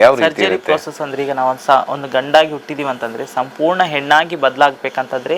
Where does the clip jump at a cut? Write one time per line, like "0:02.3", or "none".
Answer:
none